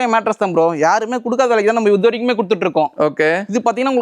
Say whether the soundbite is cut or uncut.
uncut